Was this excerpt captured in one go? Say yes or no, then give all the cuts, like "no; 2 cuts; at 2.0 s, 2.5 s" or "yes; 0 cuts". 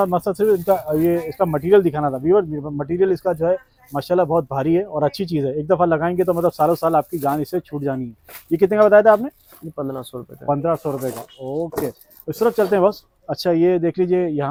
yes; 0 cuts